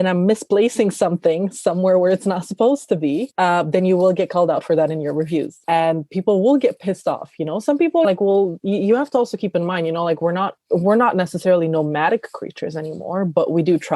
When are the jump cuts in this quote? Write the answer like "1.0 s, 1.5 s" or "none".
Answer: 5.6 s, 8.0 s